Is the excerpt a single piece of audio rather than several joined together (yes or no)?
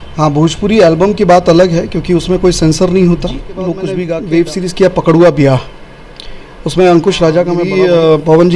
no